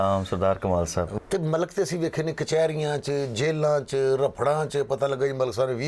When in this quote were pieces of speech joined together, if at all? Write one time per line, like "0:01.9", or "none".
0:01.2